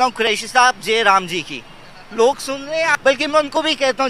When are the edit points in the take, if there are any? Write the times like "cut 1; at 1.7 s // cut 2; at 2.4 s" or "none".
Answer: cut 1; at 2.9 s

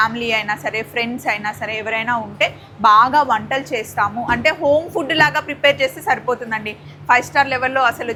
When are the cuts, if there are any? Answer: none

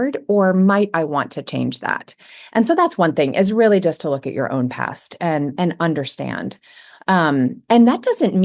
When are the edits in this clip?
none

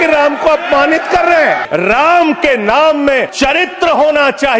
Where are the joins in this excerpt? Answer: cut 1; at 1.6 s // cut 2; at 3.3 s

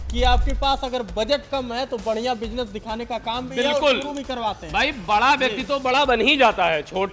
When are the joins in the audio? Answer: none

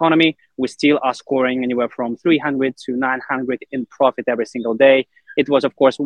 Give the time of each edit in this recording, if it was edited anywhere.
none

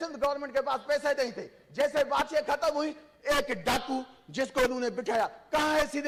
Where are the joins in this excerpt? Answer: none

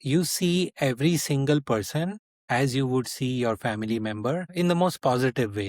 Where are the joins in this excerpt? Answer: cut 1; at 4.5 s

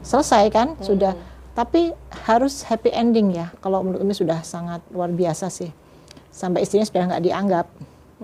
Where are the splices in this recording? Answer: cut 1; at 3.6 s

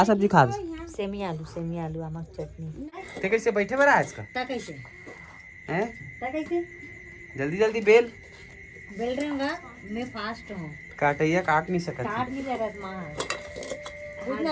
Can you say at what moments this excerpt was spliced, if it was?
cut 1; at 2.9 s

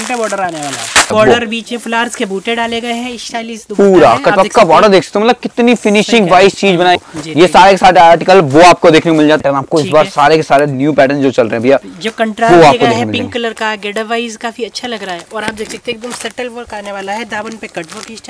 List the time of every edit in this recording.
cut 1; at 1.1 s // cut 2; at 7.0 s // cut 3; at 9.4 s

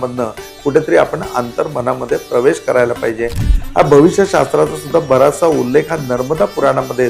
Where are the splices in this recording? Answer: cut 1; at 3.4 s

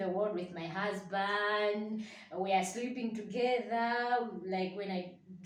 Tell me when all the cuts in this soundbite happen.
none

